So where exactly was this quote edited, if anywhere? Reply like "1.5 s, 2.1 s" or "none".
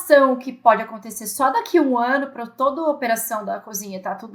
none